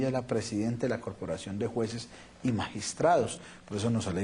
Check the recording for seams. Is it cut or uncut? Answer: cut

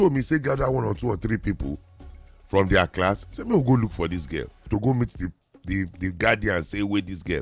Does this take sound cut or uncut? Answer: cut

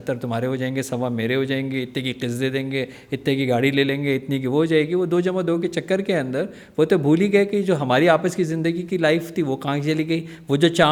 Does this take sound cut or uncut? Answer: uncut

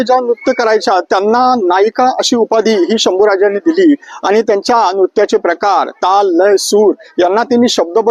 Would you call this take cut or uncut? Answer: uncut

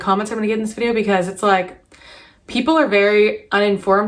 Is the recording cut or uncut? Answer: uncut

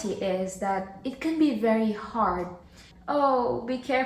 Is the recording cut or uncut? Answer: cut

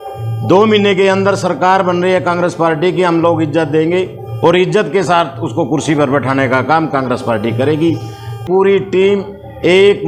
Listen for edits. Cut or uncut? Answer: cut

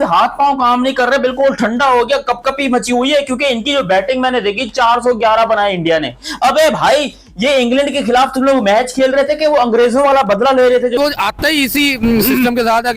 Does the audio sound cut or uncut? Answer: cut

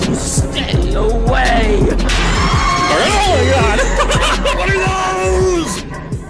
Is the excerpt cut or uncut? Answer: uncut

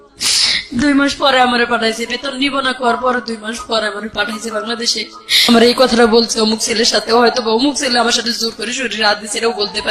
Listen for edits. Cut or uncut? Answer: cut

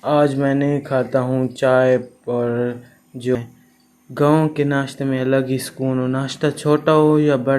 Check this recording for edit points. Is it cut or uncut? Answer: cut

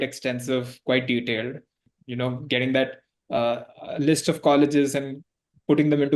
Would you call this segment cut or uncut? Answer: cut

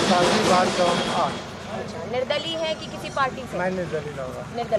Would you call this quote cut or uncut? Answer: uncut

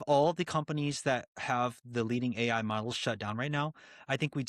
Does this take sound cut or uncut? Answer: uncut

